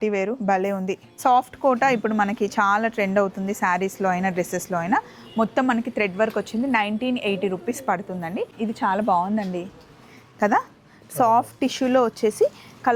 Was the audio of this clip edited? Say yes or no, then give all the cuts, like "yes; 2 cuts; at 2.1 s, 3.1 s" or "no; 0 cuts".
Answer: yes; 2 cuts; at 1.1 s, 8.5 s